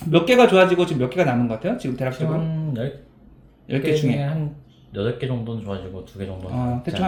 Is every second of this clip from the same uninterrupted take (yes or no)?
yes